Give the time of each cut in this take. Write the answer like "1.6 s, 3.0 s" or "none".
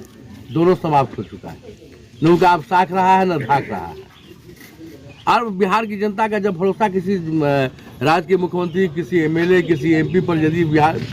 none